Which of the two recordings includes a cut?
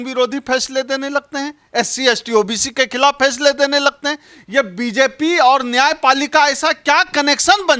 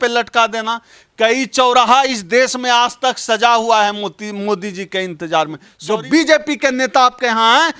second; 1 cut; at 5.7 s

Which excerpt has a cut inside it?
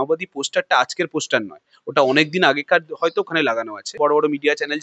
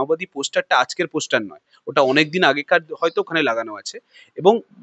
first; 1 cut; at 3.9 s

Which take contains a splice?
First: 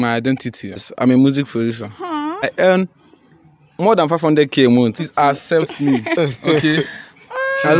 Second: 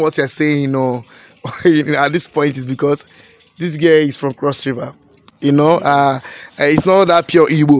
first; 3 cuts; at 0.8 s, 2.4 s, 5.0 s

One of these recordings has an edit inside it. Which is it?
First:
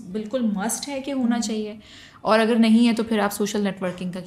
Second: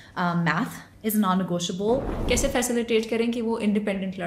second; 1 cut; at 2.1 s

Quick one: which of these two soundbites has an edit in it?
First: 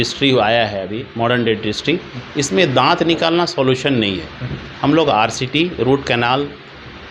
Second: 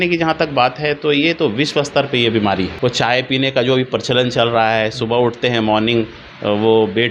second; 1 cut; at 2.7 s

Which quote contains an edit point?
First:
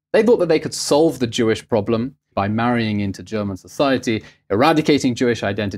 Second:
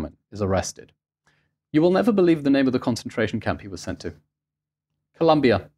first; 1 cut; at 2.3 s

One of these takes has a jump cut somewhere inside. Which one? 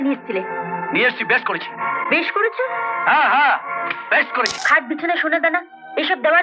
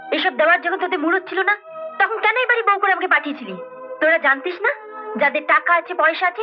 first; 1 cut; at 4.6 s

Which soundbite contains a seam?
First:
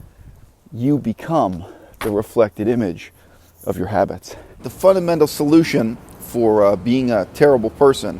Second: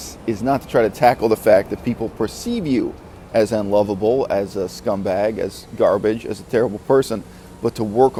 first; 1 cut; at 4.7 s

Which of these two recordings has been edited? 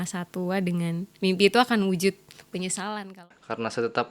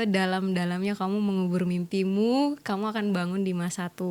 first; 1 cut; at 3.0 s

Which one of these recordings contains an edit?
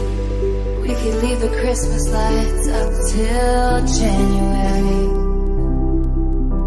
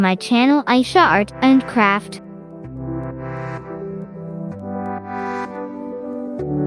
second; 1 cut; at 2.0 s

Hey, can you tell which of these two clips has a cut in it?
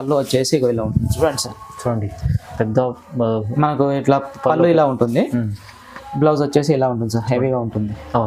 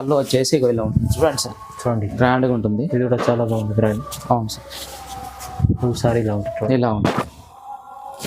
second; 1 cut; at 2.1 s

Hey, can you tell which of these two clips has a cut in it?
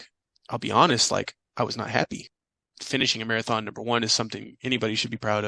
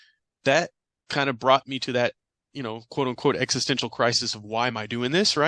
first; 1 cut; at 2.3 s

